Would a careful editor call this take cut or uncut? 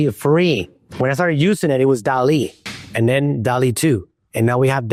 uncut